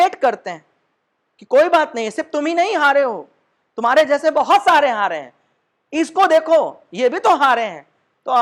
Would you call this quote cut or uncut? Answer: uncut